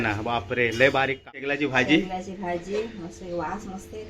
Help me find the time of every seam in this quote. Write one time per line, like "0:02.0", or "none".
0:01.5